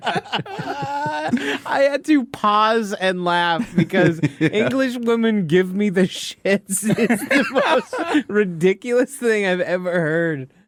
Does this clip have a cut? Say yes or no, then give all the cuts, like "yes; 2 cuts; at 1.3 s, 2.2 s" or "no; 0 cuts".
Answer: no; 0 cuts